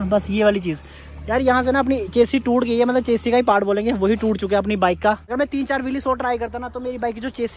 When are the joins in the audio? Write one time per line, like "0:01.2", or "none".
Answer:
none